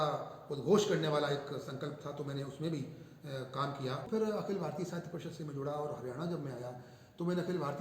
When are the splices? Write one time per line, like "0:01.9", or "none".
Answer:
0:04.1